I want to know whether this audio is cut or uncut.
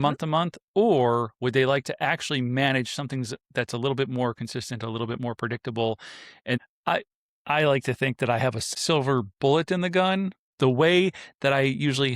cut